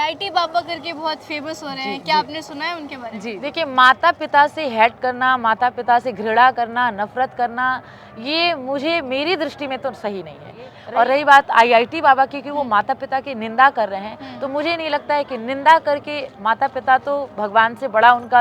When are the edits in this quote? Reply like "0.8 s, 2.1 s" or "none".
3.2 s, 10.7 s